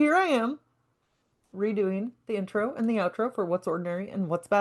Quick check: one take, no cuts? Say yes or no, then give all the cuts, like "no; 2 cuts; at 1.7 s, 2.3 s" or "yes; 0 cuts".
yes; 0 cuts